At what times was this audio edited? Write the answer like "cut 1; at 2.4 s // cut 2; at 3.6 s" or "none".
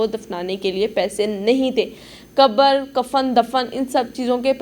none